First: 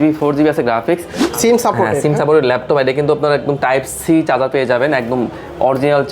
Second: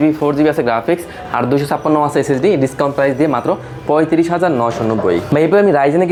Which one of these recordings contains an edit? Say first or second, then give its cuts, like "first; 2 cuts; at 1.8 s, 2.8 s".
first; 1 cut; at 1.2 s